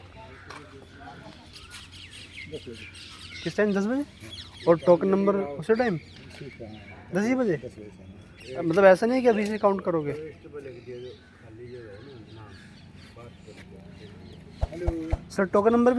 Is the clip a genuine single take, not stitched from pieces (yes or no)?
no